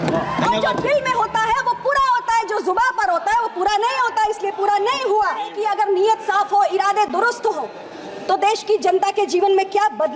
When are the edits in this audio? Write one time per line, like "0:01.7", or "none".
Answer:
0:05.5